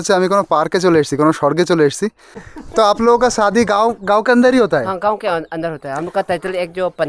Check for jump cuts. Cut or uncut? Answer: cut